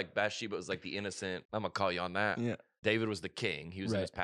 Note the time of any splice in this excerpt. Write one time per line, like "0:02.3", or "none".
0:01.4
0:02.7